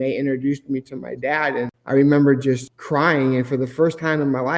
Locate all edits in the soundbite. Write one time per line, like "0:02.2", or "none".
0:01.8
0:02.7